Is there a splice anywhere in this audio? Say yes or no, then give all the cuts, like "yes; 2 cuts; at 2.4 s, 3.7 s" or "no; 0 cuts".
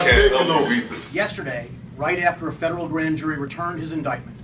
yes; 1 cut; at 1.0 s